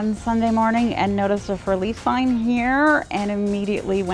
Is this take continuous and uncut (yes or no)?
yes